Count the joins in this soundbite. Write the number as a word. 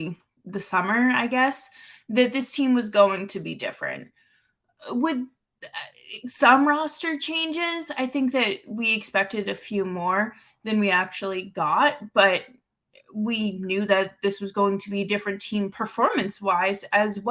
zero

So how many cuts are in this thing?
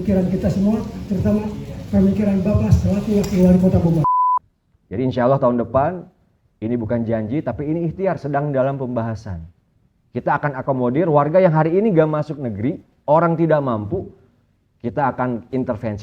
one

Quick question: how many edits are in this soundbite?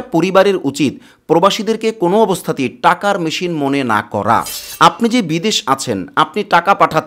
one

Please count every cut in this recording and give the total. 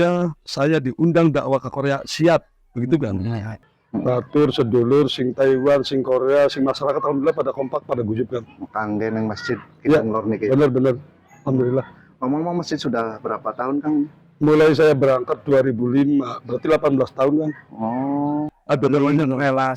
two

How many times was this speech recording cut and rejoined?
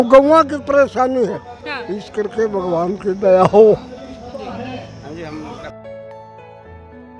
one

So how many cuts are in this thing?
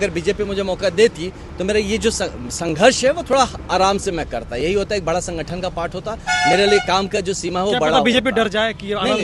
zero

